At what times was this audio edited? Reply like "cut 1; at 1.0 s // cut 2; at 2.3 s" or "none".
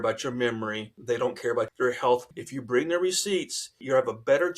cut 1; at 0.9 s // cut 2; at 1.7 s // cut 3; at 2.3 s // cut 4; at 3.8 s